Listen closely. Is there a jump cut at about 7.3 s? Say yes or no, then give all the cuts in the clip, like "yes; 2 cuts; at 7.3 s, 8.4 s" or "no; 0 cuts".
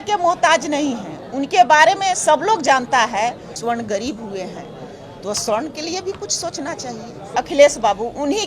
yes; 2 cuts; at 3.5 s, 7.3 s